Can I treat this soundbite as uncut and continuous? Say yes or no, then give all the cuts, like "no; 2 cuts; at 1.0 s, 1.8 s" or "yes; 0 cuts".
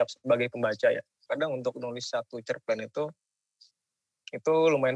no; 1 cut; at 1.1 s